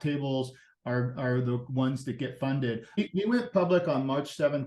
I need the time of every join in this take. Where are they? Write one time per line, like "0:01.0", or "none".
0:03.0